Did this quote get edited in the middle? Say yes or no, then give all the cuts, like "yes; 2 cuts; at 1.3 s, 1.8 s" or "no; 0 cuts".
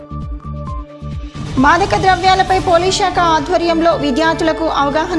yes; 1 cut; at 1.4 s